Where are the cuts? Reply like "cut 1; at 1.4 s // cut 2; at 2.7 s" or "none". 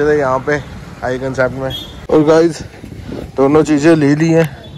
cut 1; at 2.0 s